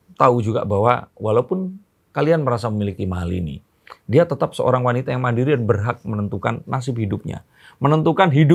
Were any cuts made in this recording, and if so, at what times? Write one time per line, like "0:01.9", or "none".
none